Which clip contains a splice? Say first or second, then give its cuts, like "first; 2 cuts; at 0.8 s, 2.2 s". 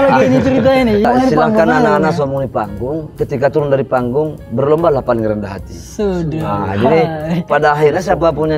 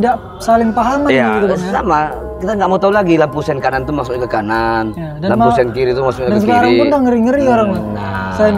first; 1 cut; at 1.0 s